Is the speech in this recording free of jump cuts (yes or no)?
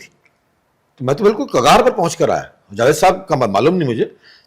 yes